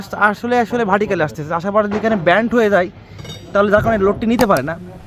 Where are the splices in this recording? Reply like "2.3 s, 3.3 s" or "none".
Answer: none

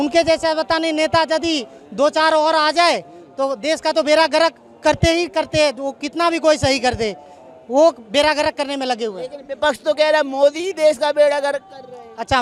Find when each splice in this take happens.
none

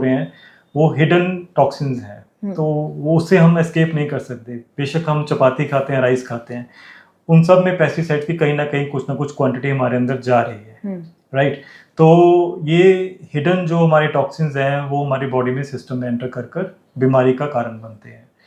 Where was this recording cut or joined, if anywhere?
none

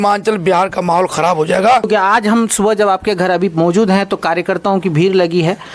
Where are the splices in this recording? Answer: 1.9 s

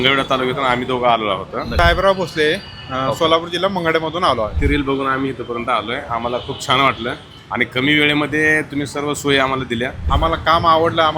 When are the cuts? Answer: 1.7 s, 4.5 s, 10.0 s

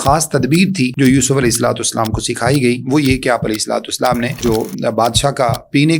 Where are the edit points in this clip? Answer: 0.9 s, 4.4 s

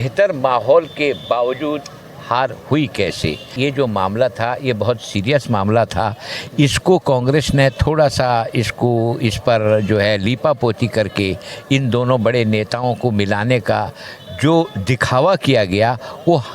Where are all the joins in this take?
3.5 s

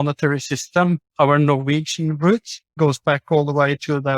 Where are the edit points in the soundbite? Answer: 1.1 s, 2.6 s

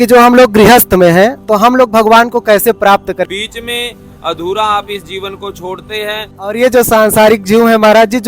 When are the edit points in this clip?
3.3 s, 6.3 s

